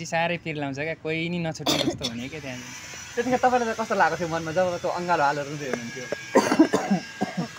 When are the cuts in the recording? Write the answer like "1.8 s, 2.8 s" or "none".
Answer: none